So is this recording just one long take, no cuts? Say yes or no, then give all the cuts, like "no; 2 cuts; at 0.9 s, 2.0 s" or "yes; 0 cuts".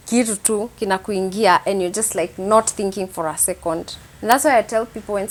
yes; 0 cuts